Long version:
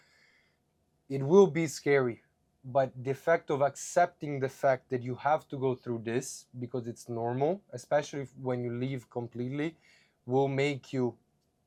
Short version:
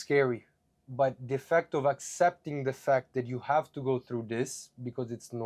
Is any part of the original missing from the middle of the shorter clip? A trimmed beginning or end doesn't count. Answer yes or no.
no